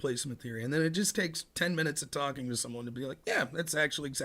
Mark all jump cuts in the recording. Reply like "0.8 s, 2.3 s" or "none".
none